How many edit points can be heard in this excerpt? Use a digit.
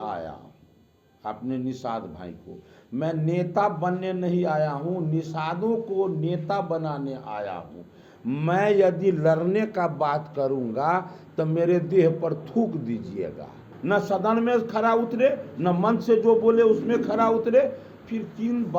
1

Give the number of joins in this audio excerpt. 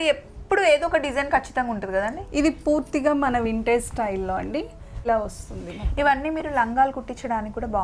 1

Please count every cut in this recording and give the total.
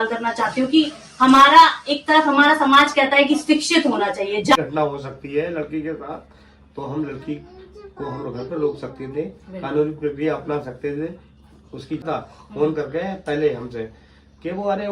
2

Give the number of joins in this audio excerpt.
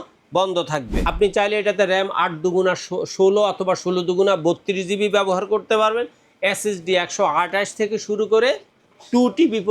1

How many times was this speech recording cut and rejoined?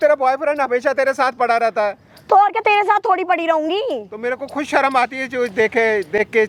0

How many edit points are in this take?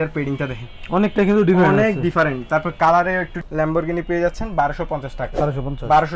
1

